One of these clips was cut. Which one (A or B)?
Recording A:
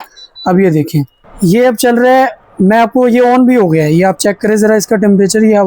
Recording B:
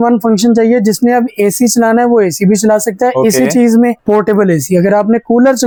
A